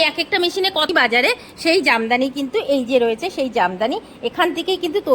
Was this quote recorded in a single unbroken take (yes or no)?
no